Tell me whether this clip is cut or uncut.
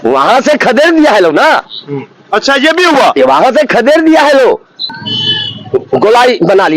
cut